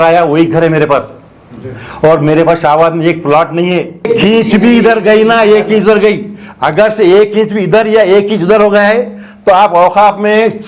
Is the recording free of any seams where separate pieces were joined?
no; 1 cut; at 4.1 s

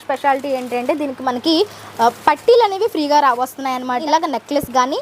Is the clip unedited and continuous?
no; 1 cut; at 4.0 s

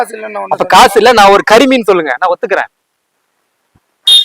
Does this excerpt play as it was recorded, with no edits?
no; 1 cut; at 2.7 s

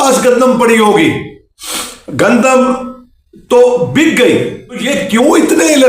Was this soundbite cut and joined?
yes; 1 cut; at 4.9 s

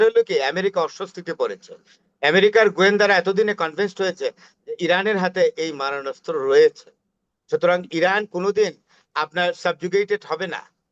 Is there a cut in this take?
no; 0 cuts

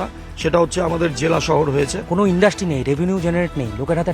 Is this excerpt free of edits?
no; 1 cut; at 2.0 s

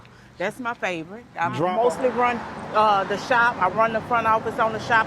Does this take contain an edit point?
yes; 1 cut; at 1.7 s

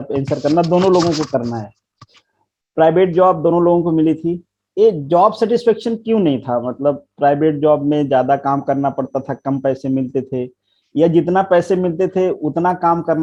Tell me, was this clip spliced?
no; 0 cuts

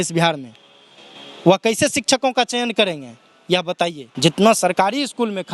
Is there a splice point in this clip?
yes; 1 cut; at 4.0 s

